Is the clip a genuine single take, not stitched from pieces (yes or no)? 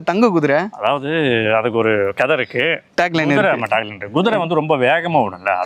yes